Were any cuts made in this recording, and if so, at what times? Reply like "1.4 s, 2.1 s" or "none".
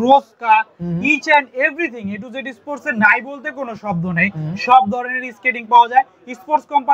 none